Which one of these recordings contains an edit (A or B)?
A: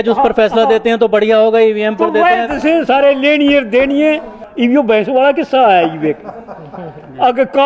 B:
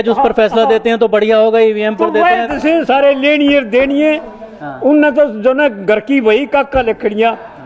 A